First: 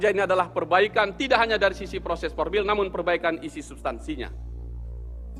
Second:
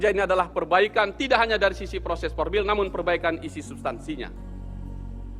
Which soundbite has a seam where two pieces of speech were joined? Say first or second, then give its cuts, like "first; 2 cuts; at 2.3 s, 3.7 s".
second; 1 cut; at 4.5 s